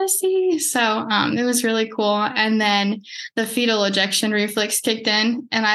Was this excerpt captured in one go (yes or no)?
yes